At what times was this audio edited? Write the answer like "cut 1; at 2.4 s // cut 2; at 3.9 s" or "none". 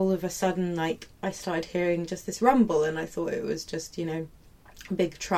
none